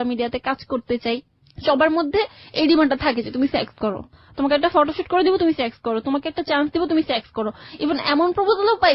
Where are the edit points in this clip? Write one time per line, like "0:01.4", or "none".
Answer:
none